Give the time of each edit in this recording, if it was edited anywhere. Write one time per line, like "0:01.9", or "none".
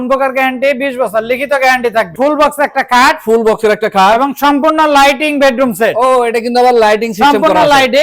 0:02.1